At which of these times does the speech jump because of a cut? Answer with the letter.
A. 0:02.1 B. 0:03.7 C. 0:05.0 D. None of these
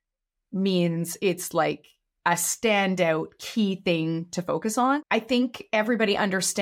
C